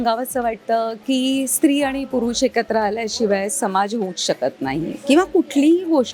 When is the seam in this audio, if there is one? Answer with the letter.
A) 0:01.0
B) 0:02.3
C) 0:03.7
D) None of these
D